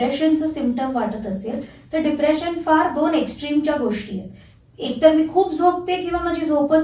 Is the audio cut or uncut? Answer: uncut